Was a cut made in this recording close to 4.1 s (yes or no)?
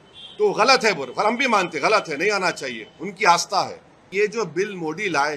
yes